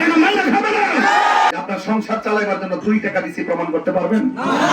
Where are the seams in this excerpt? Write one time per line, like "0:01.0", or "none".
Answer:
0:01.5